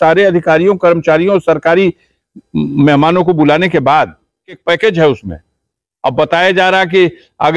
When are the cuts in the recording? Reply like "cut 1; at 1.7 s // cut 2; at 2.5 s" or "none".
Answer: cut 1; at 4.6 s

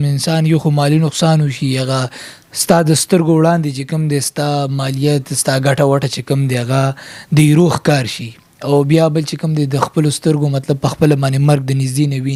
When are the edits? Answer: none

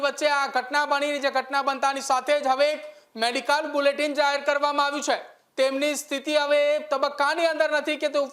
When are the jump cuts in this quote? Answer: cut 1; at 5.4 s

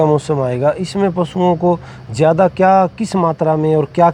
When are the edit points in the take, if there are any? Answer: none

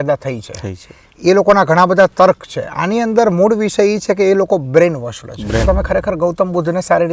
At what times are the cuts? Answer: cut 1; at 5.6 s

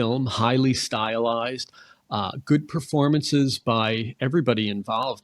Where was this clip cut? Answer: none

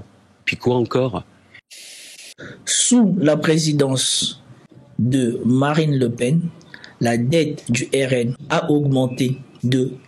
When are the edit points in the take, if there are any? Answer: cut 1; at 1.8 s

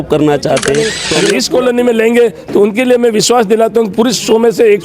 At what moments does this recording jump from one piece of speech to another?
cut 1; at 1.1 s

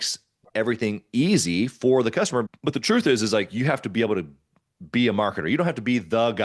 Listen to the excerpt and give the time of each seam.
cut 1; at 2.5 s

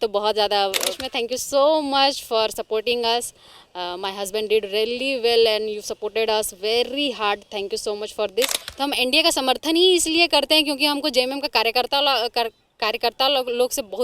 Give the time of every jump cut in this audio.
cut 1; at 1.0 s // cut 2; at 8.6 s

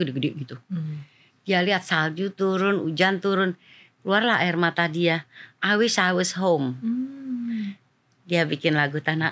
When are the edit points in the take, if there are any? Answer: none

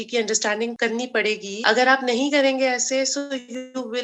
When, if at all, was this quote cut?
cut 1; at 1.0 s

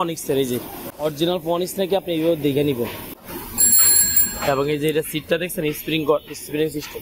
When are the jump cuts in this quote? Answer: cut 1; at 0.9 s // cut 2; at 3.1 s

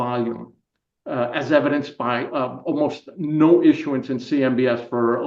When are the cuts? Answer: none

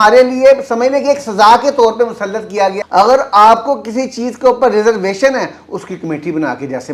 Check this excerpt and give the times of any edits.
cut 1; at 2.8 s

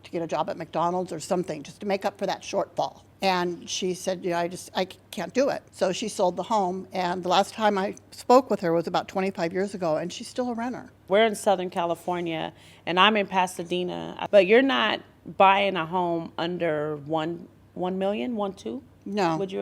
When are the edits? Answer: cut 1; at 3.0 s // cut 2; at 5.7 s // cut 3; at 11.0 s // cut 4; at 14.1 s

